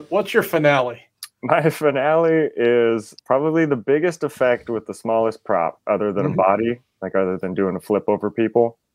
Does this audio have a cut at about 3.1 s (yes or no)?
yes